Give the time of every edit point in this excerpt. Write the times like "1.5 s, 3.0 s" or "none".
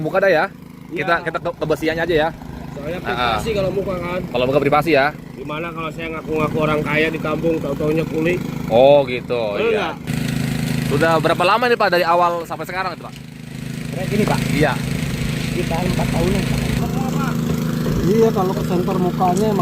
10.1 s, 16.8 s